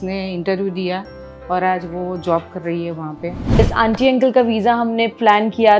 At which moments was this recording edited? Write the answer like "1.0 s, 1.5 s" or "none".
3.6 s